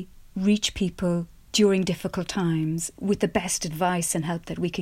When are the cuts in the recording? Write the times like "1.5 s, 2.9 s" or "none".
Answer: 2.9 s